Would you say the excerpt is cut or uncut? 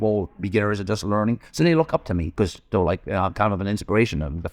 cut